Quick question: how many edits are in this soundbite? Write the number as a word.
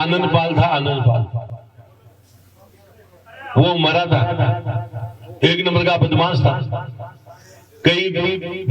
one